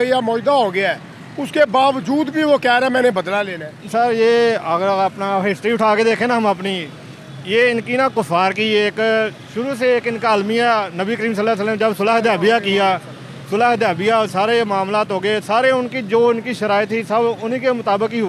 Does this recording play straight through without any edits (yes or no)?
yes